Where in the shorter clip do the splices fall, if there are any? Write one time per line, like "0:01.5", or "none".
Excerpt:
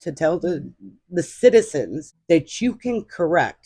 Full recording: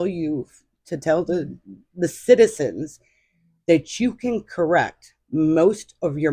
0:02.1